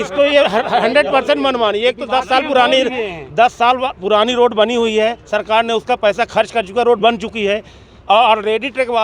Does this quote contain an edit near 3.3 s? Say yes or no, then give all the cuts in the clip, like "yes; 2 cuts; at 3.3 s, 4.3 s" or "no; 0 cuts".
no; 0 cuts